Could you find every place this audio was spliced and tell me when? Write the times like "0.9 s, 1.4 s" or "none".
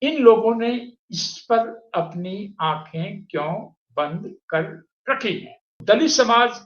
5.8 s